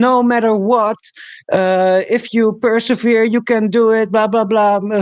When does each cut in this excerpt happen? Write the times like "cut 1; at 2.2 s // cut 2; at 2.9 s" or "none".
none